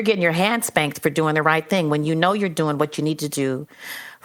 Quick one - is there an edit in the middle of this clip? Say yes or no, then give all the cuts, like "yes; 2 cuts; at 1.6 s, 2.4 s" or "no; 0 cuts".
no; 0 cuts